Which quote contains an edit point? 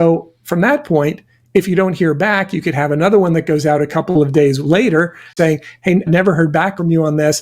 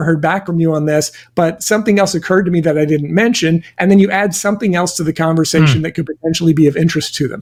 first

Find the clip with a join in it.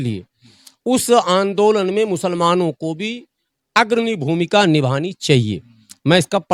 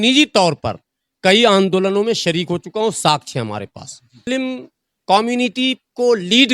second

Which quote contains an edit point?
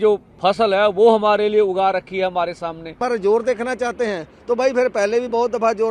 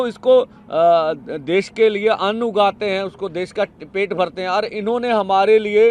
first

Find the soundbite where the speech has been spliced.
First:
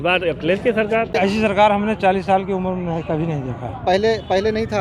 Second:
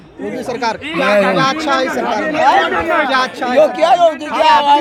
first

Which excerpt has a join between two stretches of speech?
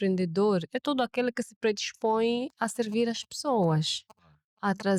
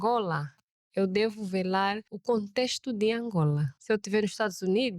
second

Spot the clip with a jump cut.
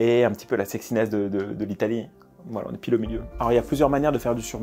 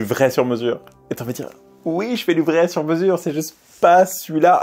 first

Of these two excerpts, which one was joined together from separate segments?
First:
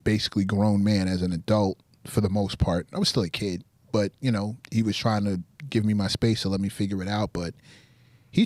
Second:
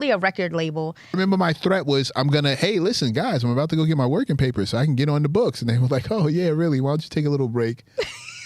second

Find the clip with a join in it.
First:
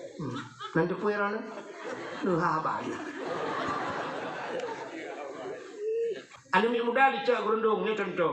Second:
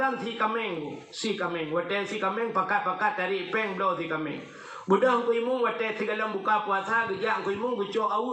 first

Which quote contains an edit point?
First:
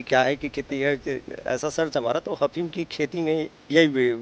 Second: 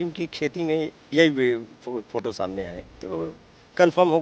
second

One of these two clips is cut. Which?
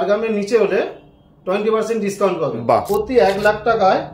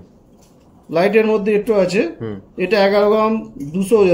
first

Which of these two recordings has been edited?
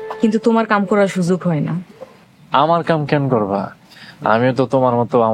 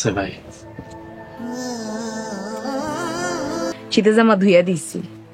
second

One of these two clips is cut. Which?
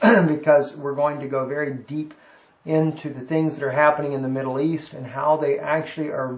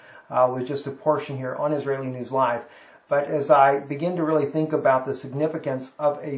first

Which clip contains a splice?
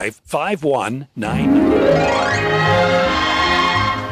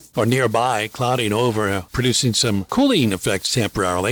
first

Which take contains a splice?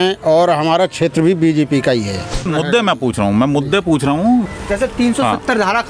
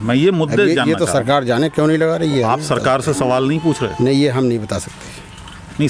first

